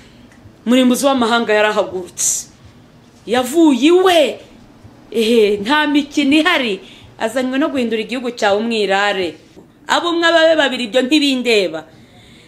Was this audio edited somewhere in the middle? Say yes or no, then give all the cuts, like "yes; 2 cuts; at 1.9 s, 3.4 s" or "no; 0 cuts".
yes; 1 cut; at 9.5 s